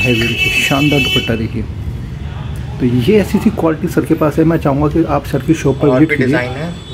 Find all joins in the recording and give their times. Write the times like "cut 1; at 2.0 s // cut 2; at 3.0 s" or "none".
none

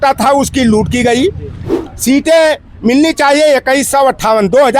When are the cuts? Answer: cut 1; at 1.7 s

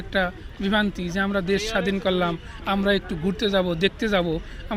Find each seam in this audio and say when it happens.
none

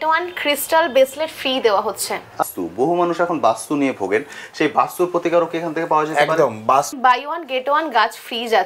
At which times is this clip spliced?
cut 1; at 2.4 s // cut 2; at 6.9 s

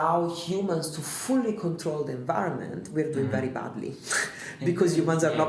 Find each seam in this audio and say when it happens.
none

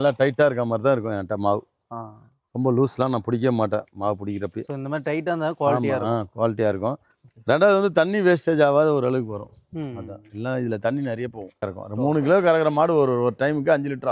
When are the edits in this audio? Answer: cut 1; at 11.8 s

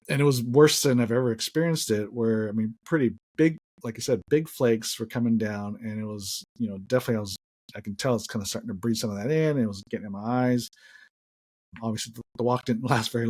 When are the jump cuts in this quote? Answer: none

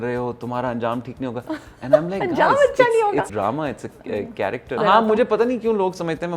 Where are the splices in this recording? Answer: cut 1; at 3.3 s // cut 2; at 4.8 s

